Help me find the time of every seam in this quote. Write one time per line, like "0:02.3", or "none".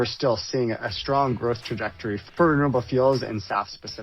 0:02.3